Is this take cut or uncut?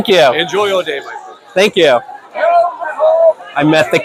uncut